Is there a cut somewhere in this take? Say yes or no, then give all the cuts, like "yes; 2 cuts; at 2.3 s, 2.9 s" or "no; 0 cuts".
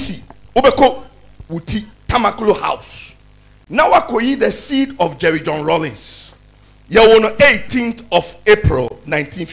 no; 0 cuts